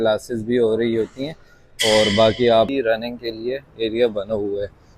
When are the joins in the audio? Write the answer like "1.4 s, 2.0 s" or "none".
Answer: 2.7 s